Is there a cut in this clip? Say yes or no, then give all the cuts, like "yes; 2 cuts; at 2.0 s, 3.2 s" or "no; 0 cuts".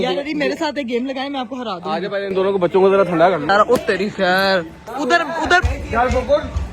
yes; 2 cuts; at 3.5 s, 4.8 s